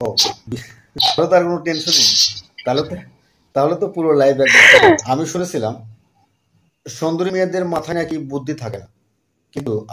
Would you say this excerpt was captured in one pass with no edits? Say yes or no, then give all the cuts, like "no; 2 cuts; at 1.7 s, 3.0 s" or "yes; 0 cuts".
no; 2 cuts; at 1.2 s, 5.0 s